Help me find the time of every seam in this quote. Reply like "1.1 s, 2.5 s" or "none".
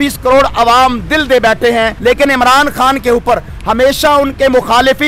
1.9 s